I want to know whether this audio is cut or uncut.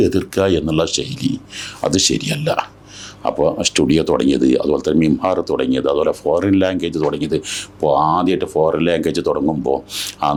uncut